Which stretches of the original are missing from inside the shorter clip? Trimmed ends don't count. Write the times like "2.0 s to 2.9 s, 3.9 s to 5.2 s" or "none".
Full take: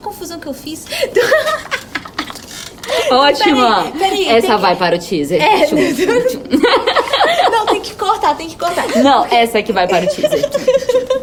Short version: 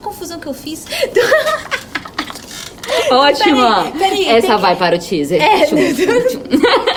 none